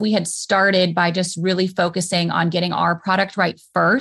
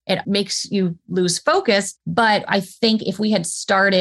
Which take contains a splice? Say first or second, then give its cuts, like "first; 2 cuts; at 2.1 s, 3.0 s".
second; 1 cut; at 1.9 s